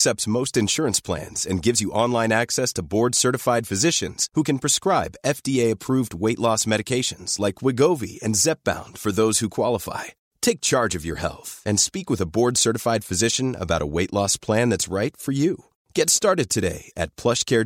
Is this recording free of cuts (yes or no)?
yes